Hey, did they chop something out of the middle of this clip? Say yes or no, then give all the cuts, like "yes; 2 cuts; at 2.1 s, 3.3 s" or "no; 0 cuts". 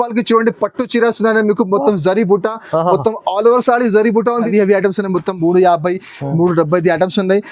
yes; 1 cut; at 4.5 s